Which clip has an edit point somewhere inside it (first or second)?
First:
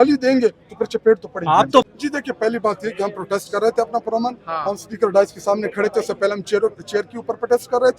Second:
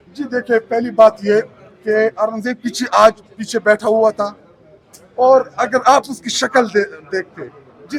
first